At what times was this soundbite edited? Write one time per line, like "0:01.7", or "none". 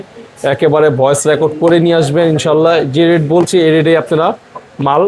none